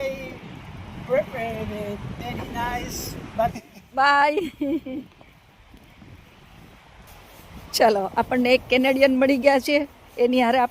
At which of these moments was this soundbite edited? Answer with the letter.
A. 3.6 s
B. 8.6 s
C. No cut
A